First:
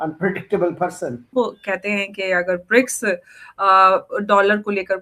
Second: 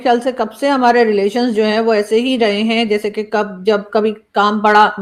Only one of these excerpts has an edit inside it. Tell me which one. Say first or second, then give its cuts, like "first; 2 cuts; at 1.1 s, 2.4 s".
first; 1 cut; at 1.3 s